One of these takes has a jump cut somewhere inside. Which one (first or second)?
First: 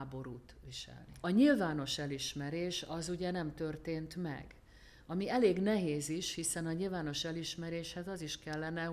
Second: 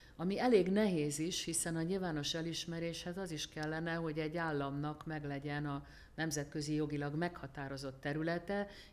first